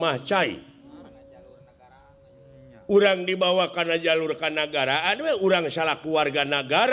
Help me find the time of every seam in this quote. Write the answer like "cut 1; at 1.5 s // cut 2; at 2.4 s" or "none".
cut 1; at 1.2 s

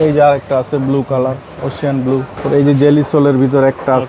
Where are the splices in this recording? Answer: cut 1; at 2.3 s

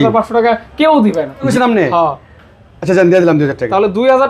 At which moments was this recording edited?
cut 1; at 1.5 s

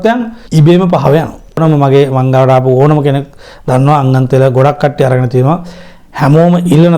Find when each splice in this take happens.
cut 1; at 1.6 s

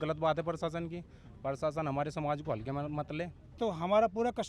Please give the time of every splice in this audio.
cut 1; at 3.6 s

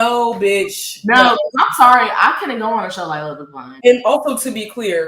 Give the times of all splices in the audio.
cut 1; at 3.7 s

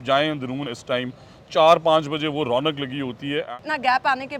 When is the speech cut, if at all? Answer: cut 1; at 3.5 s

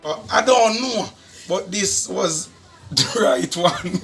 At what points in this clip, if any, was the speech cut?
none

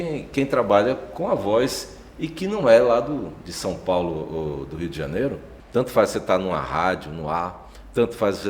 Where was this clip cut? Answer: cut 1; at 5.5 s

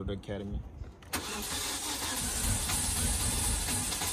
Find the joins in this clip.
none

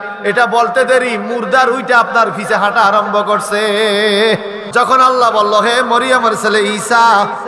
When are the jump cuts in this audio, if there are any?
cut 1; at 4.6 s

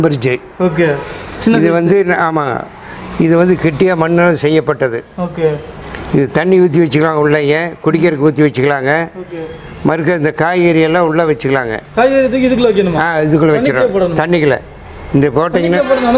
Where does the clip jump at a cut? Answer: none

